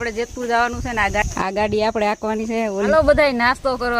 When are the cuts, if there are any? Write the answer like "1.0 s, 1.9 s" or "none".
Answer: 1.2 s, 2.9 s